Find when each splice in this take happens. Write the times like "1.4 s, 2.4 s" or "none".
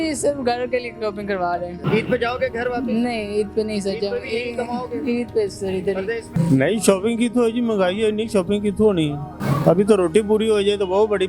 1.8 s, 6.2 s, 9.3 s